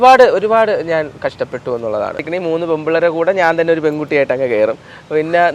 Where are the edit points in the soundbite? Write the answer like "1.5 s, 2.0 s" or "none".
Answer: 2.2 s